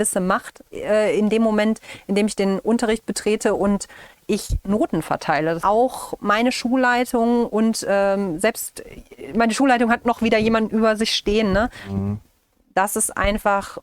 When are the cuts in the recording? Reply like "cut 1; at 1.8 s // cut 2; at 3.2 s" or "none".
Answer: cut 1; at 5.6 s